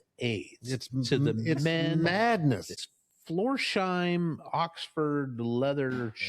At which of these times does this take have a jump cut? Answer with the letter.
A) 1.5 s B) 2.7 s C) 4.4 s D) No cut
B